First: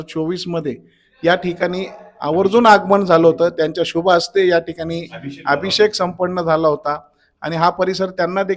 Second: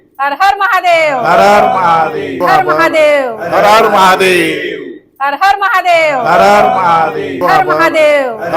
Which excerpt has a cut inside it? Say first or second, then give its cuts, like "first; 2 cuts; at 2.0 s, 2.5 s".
second; 2 cuts; at 2.4 s, 7.4 s